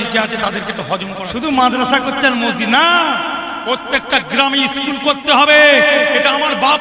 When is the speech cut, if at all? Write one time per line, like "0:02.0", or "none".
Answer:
0:01.2